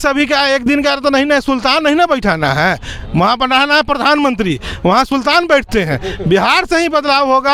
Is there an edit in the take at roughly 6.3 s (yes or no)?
no